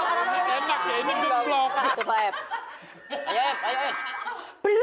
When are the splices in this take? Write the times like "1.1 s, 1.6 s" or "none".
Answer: 1.9 s